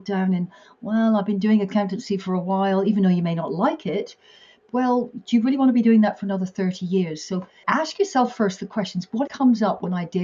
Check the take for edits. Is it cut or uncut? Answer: cut